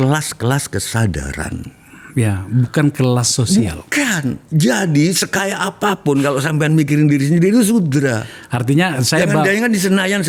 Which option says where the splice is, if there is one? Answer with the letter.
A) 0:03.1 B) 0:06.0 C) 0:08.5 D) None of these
D